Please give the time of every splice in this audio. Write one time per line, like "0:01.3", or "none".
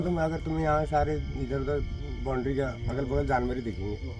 none